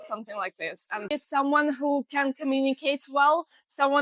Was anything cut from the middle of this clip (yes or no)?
yes